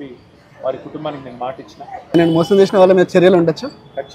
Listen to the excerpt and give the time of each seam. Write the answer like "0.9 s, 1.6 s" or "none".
2.1 s